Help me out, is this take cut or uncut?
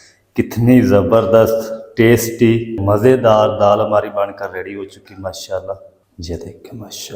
cut